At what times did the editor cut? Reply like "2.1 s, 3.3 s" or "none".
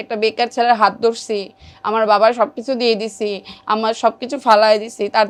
none